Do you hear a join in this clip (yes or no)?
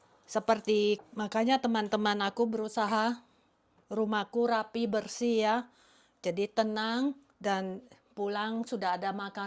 yes